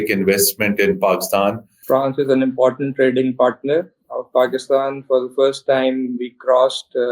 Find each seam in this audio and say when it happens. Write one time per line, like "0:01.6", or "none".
0:01.7